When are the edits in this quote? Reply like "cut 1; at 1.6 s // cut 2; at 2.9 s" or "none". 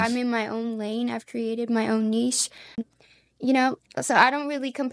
cut 1; at 2.8 s